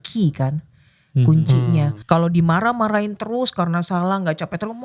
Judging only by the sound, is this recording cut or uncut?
cut